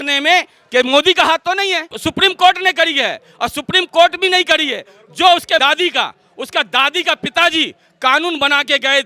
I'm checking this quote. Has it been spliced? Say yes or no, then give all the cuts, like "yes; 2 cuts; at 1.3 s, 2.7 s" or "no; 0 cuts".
yes; 2 cuts; at 2.0 s, 5.6 s